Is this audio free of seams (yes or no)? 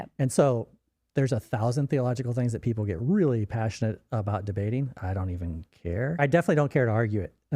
no